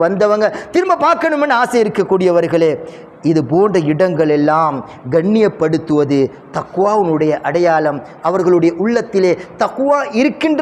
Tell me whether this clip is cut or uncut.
uncut